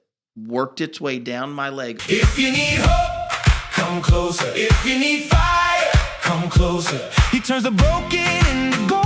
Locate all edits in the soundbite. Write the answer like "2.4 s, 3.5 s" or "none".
1.9 s